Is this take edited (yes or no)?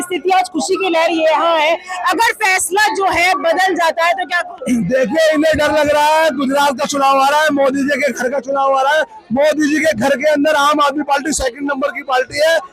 no